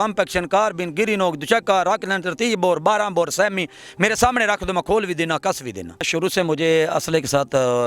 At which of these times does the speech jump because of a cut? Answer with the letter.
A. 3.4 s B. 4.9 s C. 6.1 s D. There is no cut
C